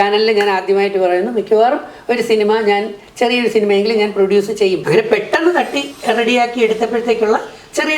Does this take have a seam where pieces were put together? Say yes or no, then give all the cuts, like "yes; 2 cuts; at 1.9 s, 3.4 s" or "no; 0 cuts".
yes; 1 cut; at 4.8 s